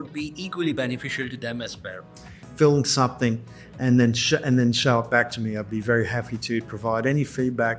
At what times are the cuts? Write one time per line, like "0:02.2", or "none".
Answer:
0:02.5